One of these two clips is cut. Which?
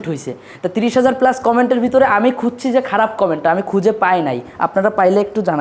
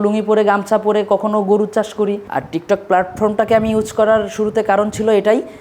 second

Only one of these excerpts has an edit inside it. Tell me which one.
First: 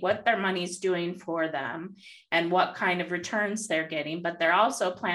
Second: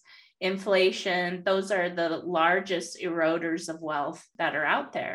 second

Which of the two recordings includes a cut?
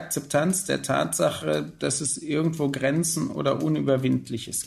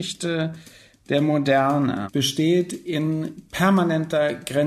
second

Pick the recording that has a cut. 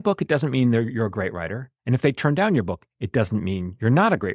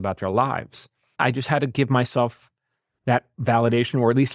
second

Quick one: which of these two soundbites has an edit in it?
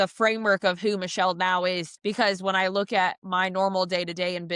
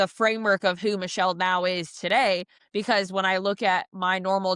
first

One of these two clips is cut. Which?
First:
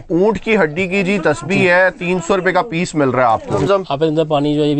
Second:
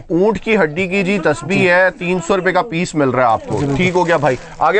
first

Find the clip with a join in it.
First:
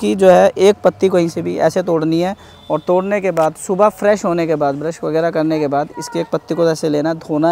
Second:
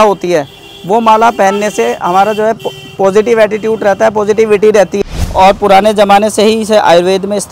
second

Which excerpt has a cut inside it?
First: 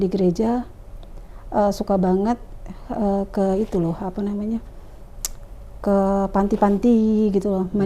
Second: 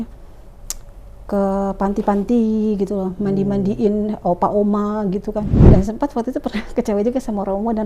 second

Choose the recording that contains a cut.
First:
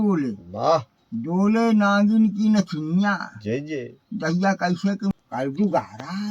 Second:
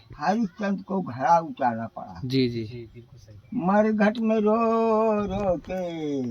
first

